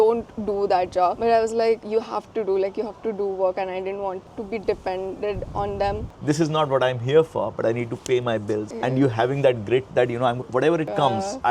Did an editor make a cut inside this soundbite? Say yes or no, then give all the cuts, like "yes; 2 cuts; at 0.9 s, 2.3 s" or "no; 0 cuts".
yes; 1 cut; at 6.0 s